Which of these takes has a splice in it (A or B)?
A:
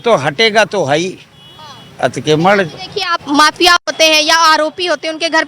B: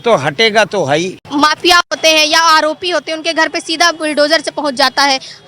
B